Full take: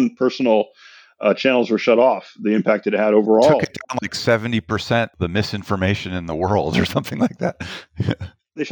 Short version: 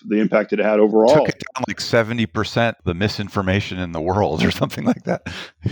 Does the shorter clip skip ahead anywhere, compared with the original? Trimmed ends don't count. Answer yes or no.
no